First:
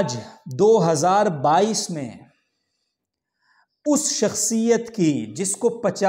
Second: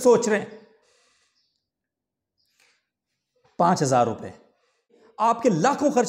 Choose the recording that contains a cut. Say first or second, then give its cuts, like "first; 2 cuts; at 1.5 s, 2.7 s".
second; 1 cut; at 5.0 s